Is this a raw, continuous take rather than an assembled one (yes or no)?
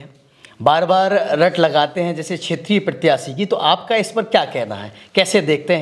yes